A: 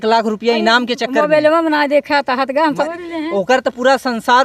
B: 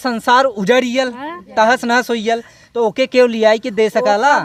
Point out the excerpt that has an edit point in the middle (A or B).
A